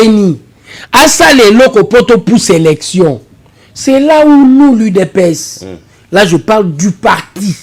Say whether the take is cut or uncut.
uncut